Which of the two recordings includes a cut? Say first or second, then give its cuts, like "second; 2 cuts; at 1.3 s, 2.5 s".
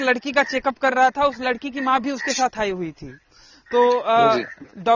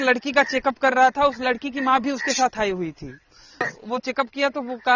second; 1 cut; at 3.7 s